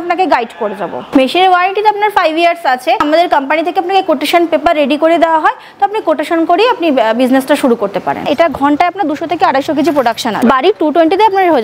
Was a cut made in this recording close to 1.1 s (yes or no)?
yes